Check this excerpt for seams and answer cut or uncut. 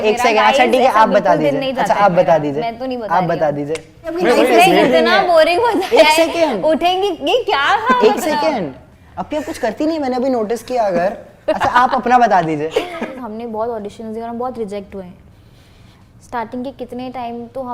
cut